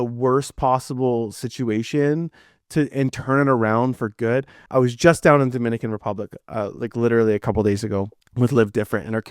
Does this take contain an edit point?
yes; 2 cuts; at 4.6 s, 8.2 s

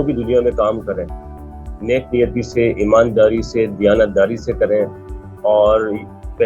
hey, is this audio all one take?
yes; 0 cuts

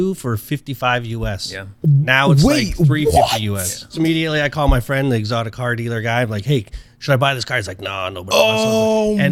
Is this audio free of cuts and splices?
no; 1 cut; at 3.9 s

